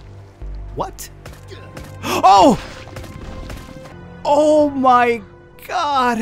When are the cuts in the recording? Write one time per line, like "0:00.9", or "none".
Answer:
0:03.9